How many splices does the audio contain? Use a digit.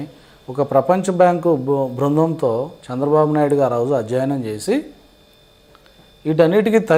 0